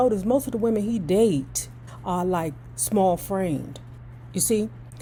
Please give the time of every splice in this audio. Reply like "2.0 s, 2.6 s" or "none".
none